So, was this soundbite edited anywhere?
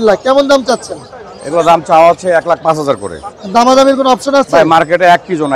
no; 0 cuts

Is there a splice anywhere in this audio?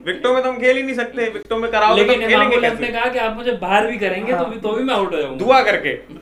no; 0 cuts

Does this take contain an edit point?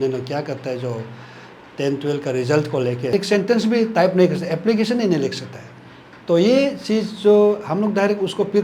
yes; 1 cut; at 3.1 s

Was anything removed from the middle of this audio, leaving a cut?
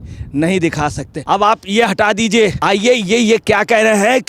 yes; 2 cuts; at 1.1 s, 2.6 s

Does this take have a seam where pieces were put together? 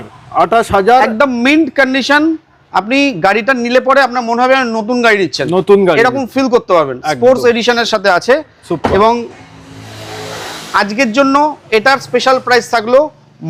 no; 0 cuts

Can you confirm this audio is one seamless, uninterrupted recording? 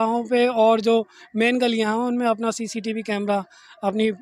yes; 0 cuts

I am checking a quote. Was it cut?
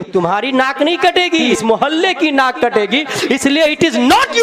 yes; 1 cut; at 1.5 s

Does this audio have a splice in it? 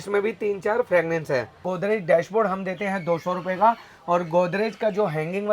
yes; 1 cut; at 1.7 s

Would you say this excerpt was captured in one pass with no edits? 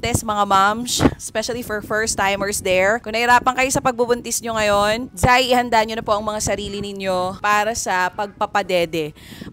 yes; 0 cuts

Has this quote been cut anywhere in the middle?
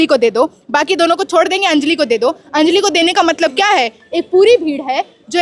no; 0 cuts

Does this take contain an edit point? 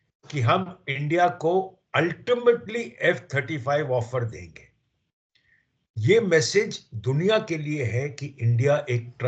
no; 0 cuts

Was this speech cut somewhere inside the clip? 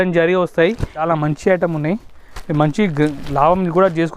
yes; 1 cut; at 1.0 s

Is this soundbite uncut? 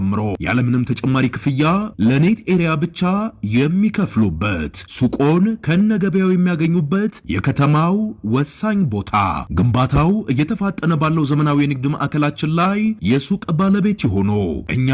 yes; 0 cuts

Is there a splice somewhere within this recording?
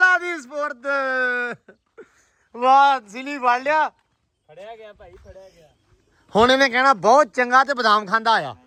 no; 0 cuts

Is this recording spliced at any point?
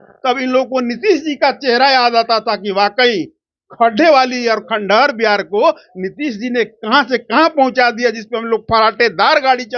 no; 0 cuts

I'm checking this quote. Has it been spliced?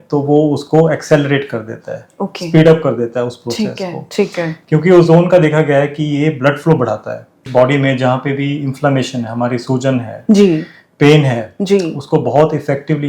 yes; 1 cut; at 7.4 s

